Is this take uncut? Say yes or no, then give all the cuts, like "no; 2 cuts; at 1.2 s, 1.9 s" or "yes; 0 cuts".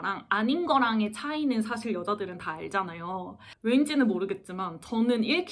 no; 1 cut; at 3.4 s